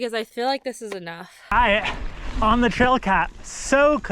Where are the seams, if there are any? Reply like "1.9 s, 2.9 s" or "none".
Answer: 1.5 s

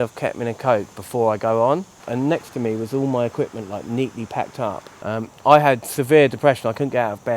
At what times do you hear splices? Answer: 2.1 s, 4.9 s

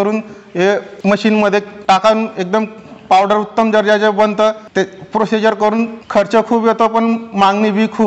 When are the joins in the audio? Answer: 0.9 s, 1.7 s, 4.6 s, 6.0 s

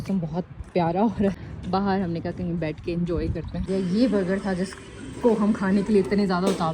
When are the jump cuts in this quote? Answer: 1.4 s, 3.6 s

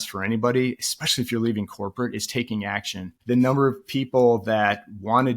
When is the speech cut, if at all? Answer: 3.1 s

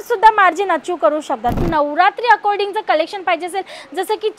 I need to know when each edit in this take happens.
1.7 s

